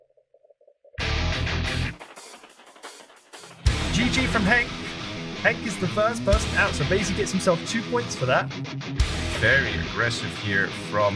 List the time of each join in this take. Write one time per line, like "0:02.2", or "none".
0:00.9